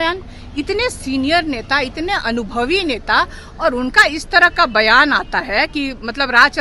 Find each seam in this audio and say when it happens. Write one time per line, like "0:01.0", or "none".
none

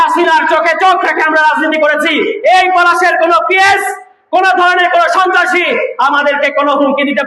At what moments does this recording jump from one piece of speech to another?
none

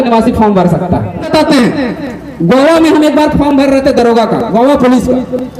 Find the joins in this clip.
0:01.3

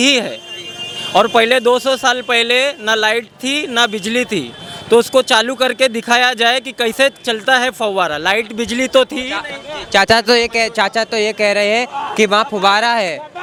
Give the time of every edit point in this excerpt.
none

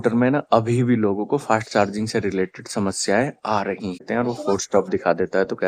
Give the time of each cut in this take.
0:03.9

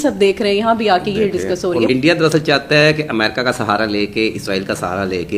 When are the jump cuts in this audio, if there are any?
0:01.9

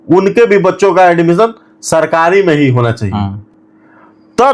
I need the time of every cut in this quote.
none

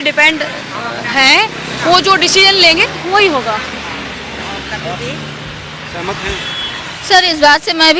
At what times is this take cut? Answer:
none

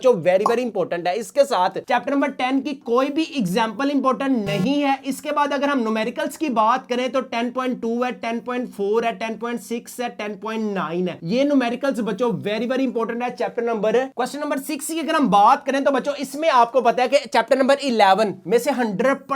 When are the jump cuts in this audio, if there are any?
0:14.1

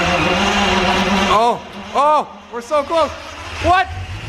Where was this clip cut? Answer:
0:01.0

